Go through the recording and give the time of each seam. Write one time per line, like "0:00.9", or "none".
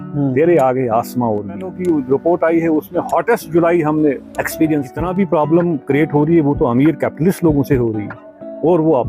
0:01.7
0:05.1